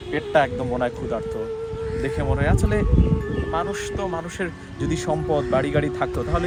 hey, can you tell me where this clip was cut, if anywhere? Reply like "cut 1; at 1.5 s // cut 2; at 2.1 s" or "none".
none